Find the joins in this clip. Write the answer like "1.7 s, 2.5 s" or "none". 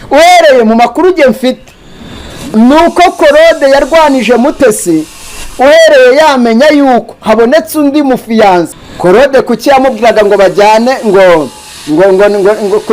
8.7 s